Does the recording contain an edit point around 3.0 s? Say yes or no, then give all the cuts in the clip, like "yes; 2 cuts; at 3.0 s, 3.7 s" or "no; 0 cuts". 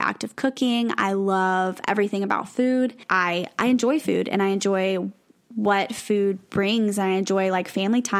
yes; 1 cut; at 3.0 s